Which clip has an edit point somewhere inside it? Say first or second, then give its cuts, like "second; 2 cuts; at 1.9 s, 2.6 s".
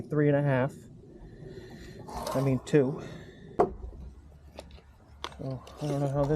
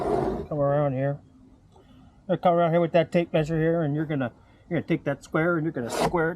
first; 1 cut; at 3.6 s